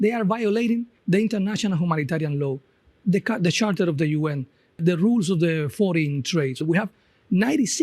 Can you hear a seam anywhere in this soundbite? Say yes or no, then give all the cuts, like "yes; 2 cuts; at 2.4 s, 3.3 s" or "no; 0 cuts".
yes; 2 cuts; at 0.9 s, 4.7 s